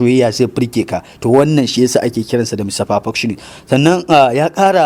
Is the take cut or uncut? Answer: uncut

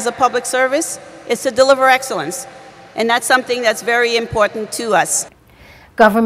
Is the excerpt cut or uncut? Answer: cut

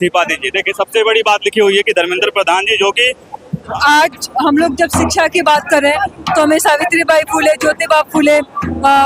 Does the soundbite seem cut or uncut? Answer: cut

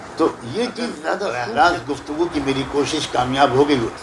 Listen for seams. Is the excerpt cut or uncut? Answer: cut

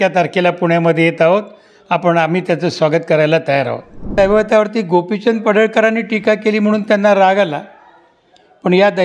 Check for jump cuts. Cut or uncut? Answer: cut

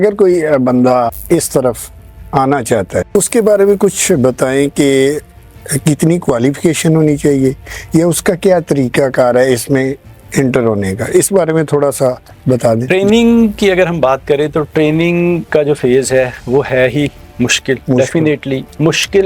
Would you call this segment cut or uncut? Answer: cut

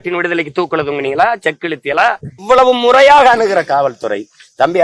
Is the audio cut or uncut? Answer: cut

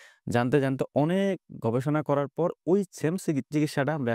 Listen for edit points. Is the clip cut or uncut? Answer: uncut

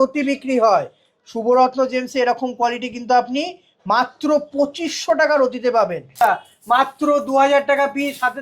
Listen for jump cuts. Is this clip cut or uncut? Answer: cut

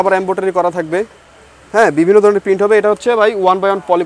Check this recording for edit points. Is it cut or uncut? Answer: uncut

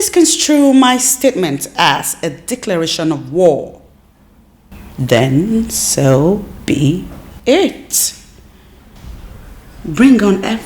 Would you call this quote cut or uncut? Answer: uncut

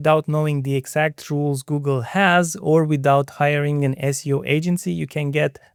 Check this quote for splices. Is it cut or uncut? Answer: uncut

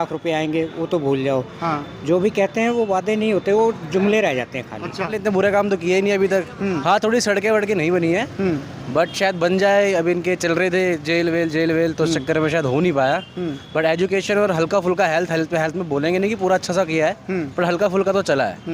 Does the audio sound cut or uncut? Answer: cut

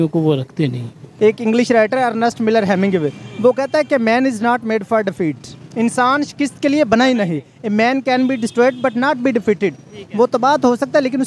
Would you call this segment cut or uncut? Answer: cut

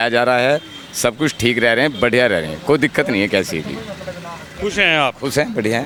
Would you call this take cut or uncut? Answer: uncut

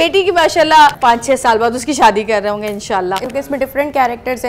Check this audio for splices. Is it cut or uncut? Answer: cut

